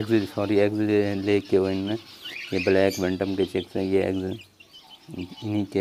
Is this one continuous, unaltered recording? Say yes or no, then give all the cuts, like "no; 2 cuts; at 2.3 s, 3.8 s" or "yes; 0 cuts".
yes; 0 cuts